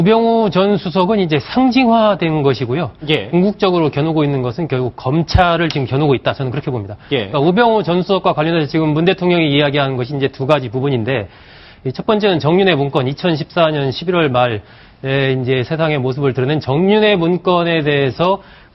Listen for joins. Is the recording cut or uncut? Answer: cut